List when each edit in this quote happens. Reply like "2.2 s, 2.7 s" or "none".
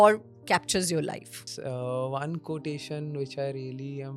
1.5 s